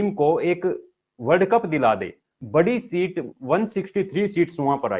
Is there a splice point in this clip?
no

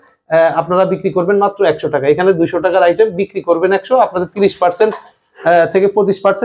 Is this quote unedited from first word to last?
yes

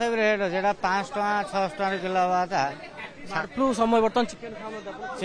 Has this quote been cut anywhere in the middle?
no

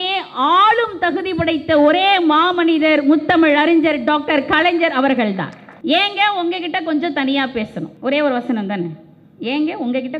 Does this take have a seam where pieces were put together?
yes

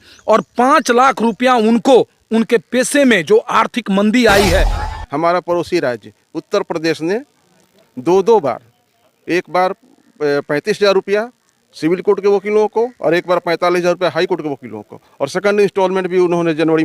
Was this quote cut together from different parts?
yes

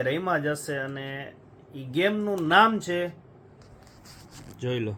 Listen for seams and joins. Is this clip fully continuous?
yes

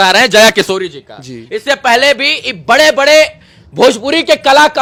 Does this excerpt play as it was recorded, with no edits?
yes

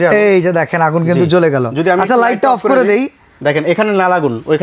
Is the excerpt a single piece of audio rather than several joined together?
yes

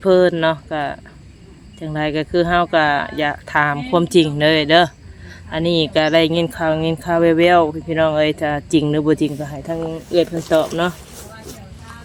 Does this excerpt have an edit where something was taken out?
no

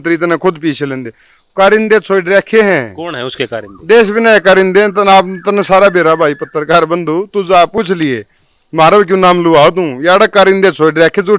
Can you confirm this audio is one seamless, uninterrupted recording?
yes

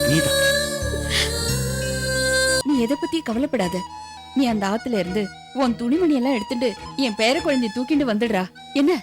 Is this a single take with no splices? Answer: no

